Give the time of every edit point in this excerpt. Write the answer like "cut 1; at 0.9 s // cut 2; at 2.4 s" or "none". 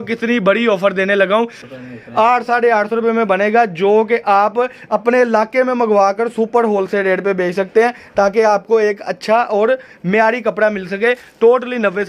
cut 1; at 1.6 s